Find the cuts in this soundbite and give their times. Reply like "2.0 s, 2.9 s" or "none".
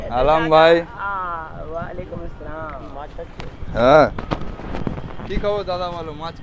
none